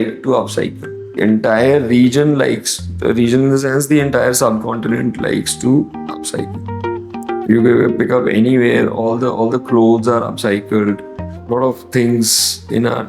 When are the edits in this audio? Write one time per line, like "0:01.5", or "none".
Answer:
0:01.2
0:11.4